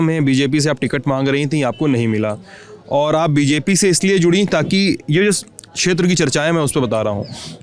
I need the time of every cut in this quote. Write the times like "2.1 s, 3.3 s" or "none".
none